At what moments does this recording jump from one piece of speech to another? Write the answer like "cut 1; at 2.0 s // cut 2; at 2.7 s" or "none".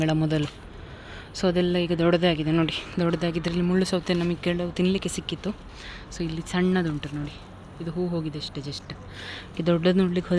none